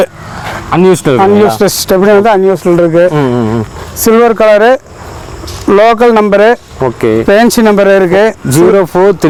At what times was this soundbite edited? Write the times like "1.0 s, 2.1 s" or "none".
none